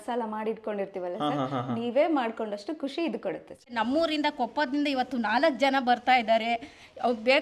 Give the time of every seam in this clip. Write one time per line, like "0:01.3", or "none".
0:03.6